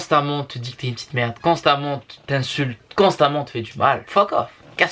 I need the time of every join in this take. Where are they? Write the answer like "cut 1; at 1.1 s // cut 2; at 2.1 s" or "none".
none